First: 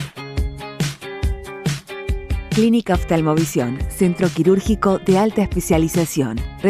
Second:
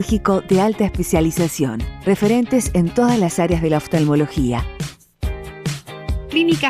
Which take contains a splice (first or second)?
first